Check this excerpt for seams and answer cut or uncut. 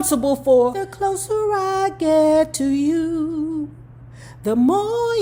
uncut